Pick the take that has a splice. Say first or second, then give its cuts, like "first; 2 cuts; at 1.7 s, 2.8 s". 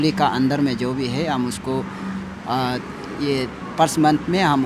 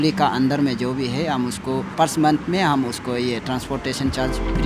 second; 1 cut; at 1.9 s